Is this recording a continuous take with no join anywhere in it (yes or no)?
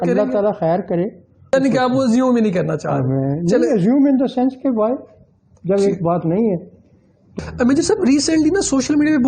no